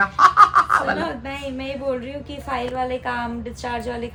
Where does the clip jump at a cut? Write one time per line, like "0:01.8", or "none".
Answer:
none